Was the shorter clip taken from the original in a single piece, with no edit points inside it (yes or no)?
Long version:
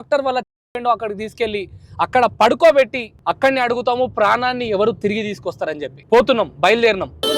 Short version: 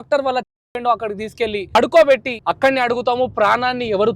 no